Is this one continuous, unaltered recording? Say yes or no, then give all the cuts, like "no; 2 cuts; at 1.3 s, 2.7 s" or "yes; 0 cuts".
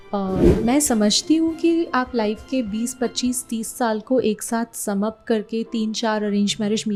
yes; 0 cuts